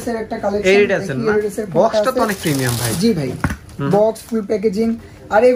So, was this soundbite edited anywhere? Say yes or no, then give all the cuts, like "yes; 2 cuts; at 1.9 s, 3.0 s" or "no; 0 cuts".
no; 0 cuts